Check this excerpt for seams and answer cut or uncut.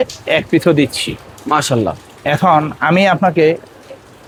uncut